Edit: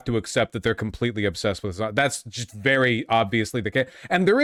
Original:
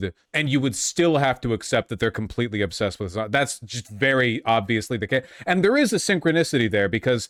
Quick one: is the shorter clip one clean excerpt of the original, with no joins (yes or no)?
yes